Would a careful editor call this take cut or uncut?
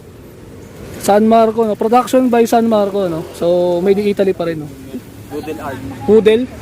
cut